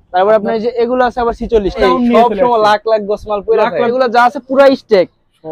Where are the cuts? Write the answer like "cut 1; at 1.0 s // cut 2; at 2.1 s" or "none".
cut 1; at 1.8 s // cut 2; at 3.9 s